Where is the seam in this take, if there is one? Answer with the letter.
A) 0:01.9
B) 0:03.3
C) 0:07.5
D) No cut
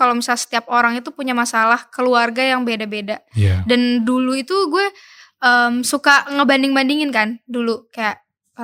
D